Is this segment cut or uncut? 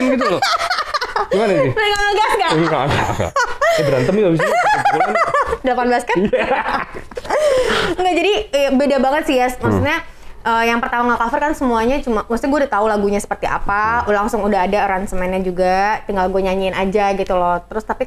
uncut